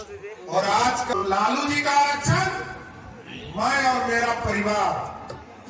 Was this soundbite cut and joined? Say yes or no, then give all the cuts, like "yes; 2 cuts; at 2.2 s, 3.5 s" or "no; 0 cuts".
yes; 1 cut; at 1.1 s